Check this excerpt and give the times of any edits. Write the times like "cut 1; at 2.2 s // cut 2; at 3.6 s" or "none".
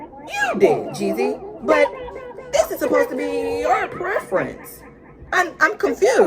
none